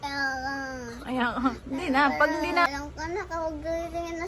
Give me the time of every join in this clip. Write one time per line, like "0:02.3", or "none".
0:02.7

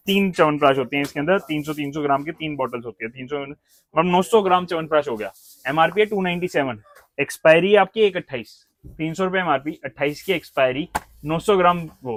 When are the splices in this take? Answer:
none

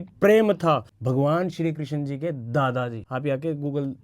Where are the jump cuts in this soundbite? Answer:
0:00.9
0:03.0

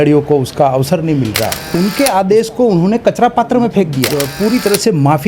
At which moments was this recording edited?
0:01.5
0:04.0

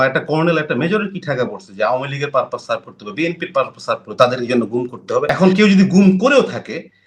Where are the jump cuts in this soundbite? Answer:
0:05.3

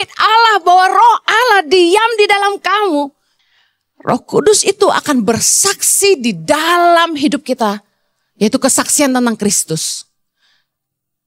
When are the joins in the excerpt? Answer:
0:03.3

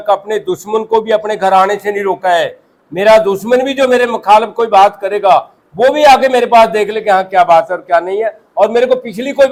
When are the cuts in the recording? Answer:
none

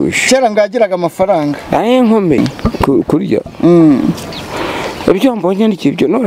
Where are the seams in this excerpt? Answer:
0:02.4

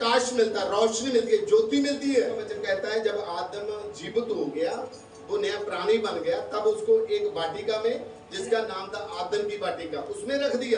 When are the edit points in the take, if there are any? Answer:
0:02.5

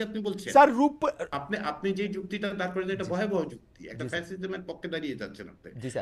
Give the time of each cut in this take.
0:01.3

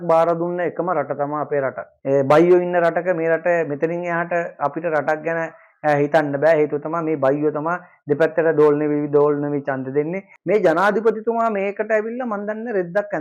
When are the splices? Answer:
0:01.9
0:10.3

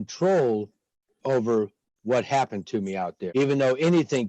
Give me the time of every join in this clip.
0:03.2

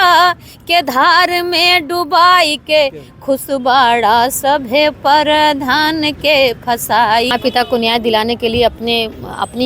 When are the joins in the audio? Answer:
0:07.3

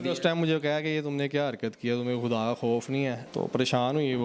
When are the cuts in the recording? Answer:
0:03.2

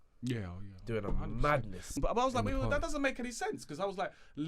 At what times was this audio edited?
0:02.0

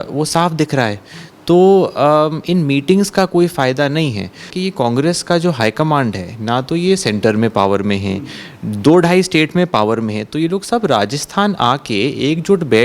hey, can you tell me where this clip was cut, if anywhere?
0:04.5

